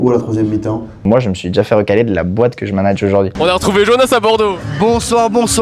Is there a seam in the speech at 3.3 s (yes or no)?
yes